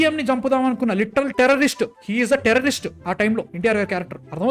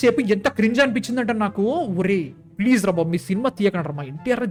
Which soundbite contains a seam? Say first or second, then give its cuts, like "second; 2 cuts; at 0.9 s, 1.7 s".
first; 1 cut; at 3.5 s